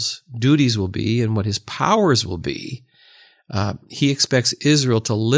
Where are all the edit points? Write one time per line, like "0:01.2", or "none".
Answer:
none